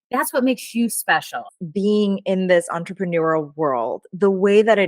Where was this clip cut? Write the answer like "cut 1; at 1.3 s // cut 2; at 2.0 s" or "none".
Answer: cut 1; at 1.5 s